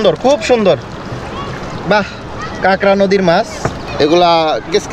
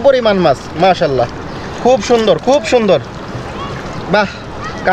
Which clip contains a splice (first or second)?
first